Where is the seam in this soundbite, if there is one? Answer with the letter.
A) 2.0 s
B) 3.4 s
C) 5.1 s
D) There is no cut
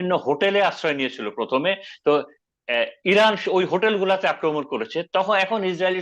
D